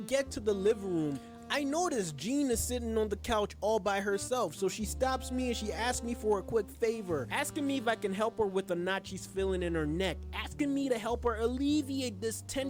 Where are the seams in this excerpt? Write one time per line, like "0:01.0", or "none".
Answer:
none